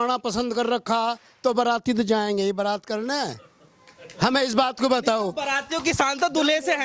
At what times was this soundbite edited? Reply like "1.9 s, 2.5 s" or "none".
none